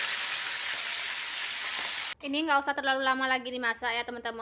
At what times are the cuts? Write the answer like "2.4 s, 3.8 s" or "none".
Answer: 2.1 s